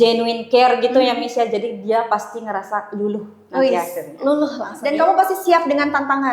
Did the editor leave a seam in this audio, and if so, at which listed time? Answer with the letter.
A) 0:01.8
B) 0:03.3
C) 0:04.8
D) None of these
C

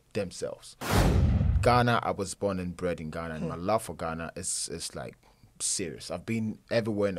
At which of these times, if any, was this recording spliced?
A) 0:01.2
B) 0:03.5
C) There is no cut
A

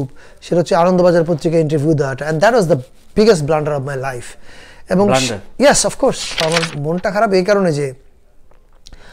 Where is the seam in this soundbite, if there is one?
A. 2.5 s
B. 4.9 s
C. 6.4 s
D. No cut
C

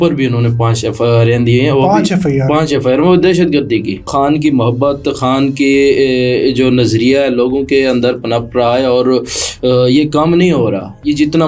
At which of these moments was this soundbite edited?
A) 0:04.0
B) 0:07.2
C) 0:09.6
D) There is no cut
A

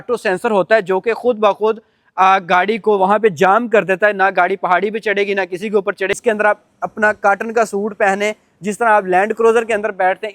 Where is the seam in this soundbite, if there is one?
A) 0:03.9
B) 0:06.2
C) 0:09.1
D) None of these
B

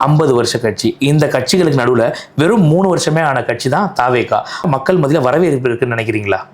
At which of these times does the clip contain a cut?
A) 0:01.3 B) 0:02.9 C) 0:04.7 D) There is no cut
C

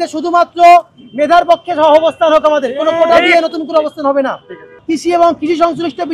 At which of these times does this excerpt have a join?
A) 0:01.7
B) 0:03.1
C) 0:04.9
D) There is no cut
C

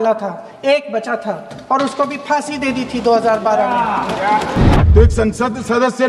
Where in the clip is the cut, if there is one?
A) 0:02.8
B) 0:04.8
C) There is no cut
B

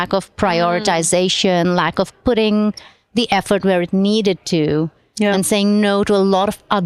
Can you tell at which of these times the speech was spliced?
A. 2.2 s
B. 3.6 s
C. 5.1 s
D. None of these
D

